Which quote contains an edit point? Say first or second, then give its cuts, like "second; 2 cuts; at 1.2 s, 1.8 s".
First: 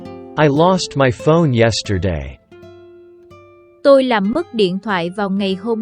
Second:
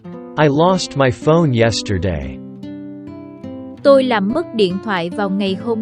second; 2 cuts; at 2.2 s, 3.8 s